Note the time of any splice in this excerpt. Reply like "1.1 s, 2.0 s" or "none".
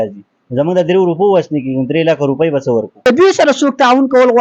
3.0 s